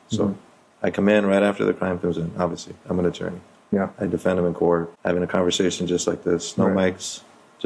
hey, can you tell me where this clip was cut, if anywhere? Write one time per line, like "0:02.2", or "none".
0:04.9